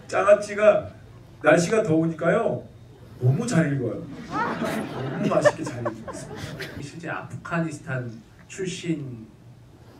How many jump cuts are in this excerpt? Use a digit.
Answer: 1